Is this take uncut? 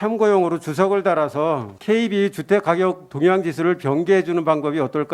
no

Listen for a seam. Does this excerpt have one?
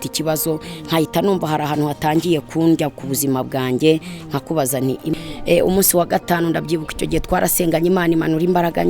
yes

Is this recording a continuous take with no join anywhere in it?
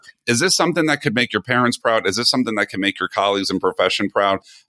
yes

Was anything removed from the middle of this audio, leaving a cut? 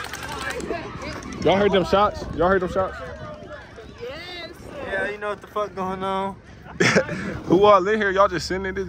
no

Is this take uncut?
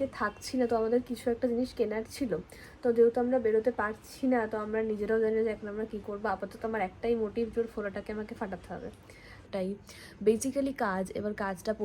no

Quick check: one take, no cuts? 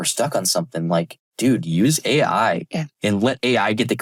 yes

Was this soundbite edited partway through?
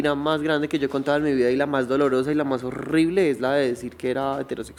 no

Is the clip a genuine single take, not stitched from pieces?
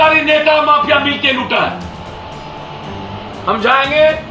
no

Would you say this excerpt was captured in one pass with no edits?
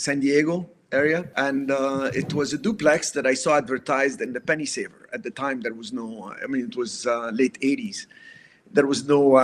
no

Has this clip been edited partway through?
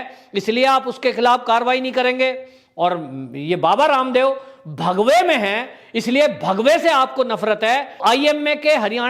yes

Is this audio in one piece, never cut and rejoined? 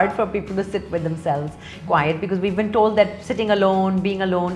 yes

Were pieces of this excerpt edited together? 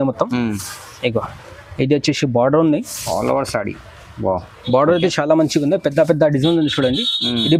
no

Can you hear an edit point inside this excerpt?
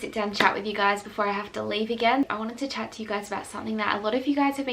yes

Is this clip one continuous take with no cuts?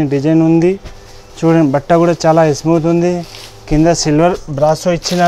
yes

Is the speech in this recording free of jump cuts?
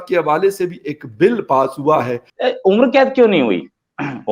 no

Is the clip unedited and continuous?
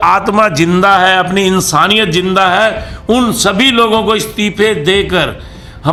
yes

